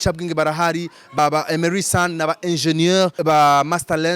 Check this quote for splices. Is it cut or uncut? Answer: cut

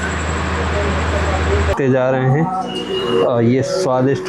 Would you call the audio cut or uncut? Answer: cut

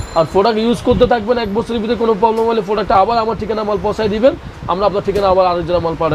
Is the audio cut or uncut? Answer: uncut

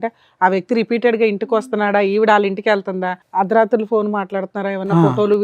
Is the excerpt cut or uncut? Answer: cut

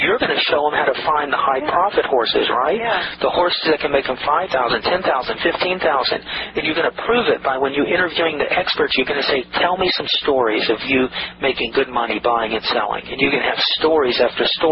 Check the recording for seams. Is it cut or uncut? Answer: uncut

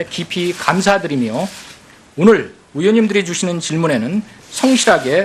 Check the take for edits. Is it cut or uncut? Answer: uncut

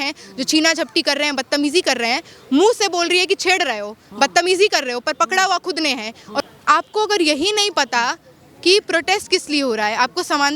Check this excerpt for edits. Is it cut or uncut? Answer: cut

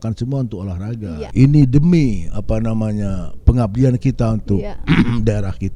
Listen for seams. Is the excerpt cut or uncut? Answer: cut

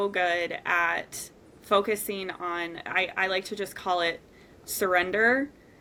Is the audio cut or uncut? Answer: uncut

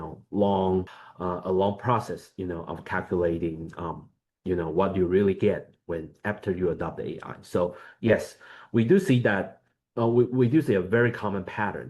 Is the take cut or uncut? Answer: cut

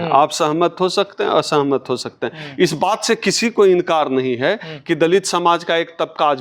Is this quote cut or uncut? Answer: uncut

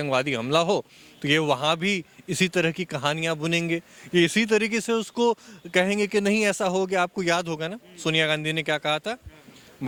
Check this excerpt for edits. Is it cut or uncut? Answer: uncut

